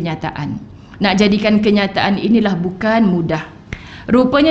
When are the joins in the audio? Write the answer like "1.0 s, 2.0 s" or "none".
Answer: 3.6 s